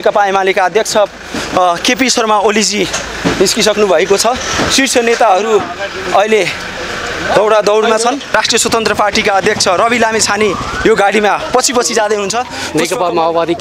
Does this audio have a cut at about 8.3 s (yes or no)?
yes